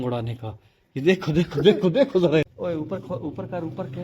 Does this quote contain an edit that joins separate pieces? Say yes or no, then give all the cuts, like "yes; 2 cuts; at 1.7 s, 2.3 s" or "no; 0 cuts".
yes; 1 cut; at 2.5 s